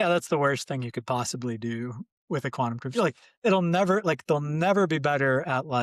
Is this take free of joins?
yes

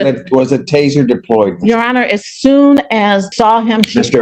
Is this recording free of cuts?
no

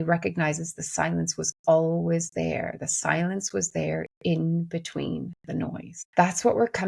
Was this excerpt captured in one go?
no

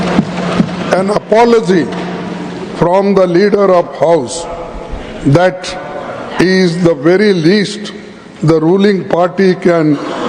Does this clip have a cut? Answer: no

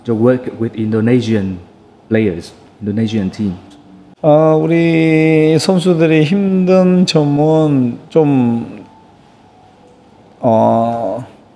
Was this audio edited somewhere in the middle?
no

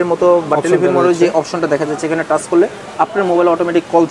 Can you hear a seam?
no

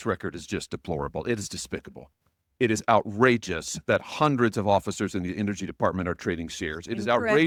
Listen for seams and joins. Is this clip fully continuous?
yes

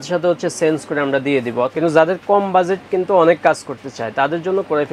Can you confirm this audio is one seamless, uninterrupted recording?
no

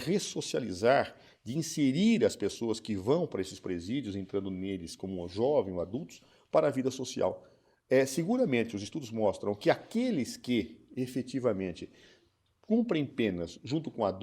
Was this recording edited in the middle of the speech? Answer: yes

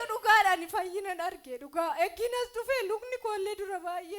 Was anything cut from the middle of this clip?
no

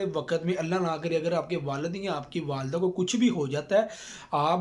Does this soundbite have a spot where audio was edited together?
no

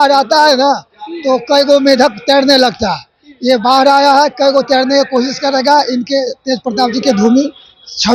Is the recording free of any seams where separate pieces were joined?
yes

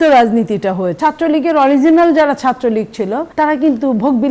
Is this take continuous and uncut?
no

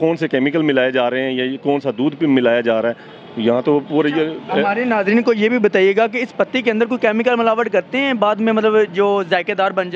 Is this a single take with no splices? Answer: yes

